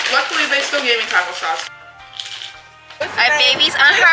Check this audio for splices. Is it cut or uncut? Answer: cut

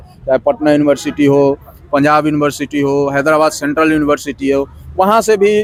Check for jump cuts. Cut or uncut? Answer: uncut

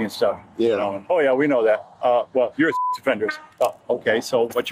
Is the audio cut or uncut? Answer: uncut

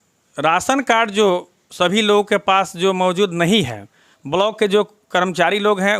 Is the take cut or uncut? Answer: cut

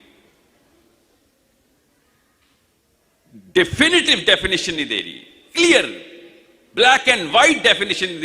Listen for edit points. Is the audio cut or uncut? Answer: uncut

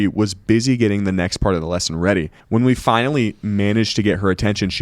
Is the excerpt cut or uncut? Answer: cut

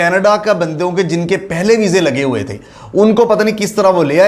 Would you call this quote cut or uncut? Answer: uncut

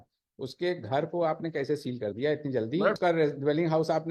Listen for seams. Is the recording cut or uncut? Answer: cut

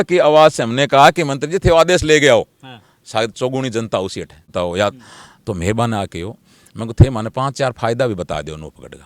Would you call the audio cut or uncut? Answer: cut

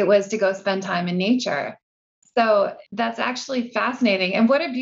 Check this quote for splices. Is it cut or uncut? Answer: cut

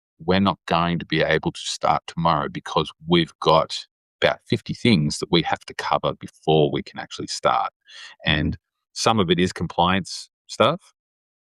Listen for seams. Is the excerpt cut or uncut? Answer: uncut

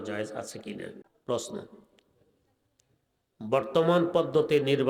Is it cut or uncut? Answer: cut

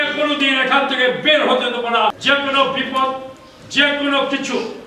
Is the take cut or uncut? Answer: cut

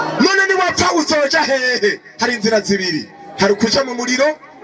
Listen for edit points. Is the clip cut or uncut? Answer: uncut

